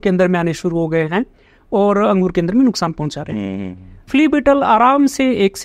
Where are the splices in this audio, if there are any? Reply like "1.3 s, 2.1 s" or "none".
4.0 s